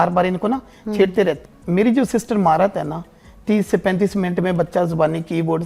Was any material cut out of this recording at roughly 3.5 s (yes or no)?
no